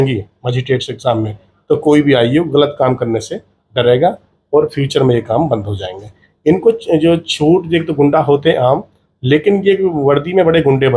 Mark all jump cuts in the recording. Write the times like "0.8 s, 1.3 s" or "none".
none